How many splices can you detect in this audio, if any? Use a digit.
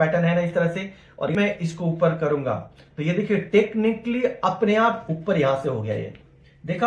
1